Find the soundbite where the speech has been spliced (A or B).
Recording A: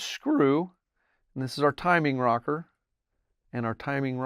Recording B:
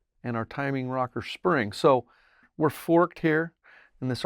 B